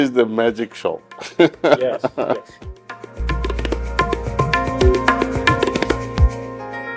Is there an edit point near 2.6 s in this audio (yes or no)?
yes